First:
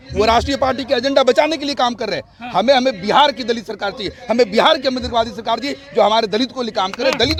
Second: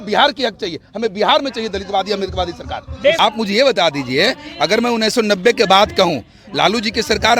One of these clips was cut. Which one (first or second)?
second